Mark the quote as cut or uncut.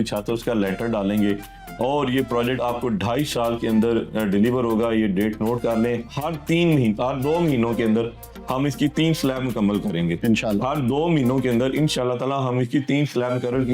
uncut